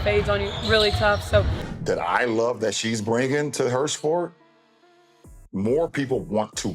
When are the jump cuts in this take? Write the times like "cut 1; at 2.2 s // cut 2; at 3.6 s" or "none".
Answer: cut 1; at 1.7 s